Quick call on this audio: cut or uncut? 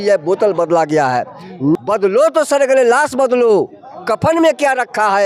uncut